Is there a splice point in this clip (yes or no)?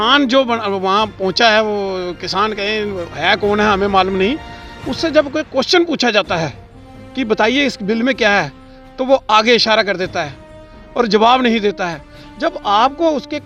no